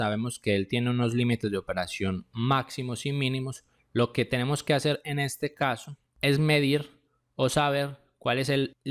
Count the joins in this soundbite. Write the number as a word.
zero